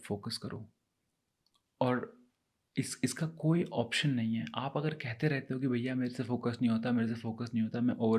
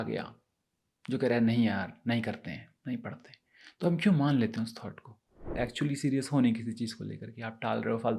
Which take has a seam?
second; 1 cut; at 5.6 s

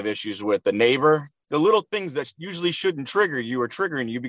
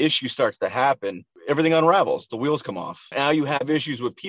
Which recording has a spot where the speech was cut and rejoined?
second; 1 cut; at 3.1 s

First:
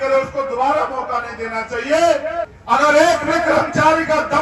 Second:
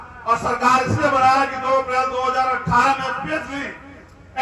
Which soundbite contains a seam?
first; 1 cut; at 2.5 s

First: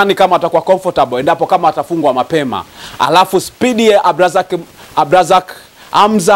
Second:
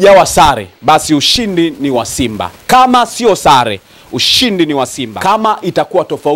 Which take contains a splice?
second; 1 cut; at 5.0 s

